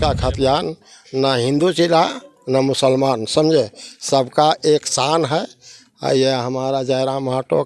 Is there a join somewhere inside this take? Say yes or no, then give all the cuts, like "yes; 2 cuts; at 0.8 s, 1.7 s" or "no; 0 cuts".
no; 0 cuts